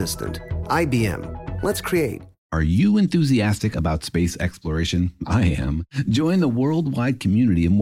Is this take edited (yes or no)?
yes